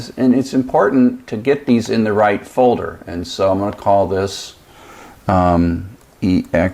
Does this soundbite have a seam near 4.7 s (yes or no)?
no